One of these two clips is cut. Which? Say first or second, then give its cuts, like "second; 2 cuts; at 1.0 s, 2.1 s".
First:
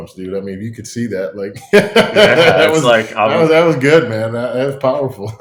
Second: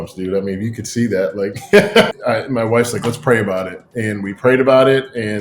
second; 1 cut; at 2.1 s